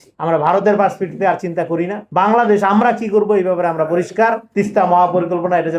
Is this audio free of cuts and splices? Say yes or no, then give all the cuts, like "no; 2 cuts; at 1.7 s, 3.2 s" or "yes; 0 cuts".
no; 1 cut; at 4.4 s